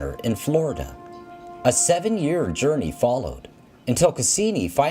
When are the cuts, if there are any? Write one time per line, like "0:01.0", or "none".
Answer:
0:02.3